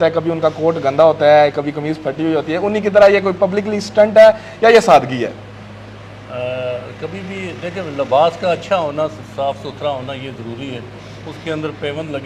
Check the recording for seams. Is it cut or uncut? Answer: uncut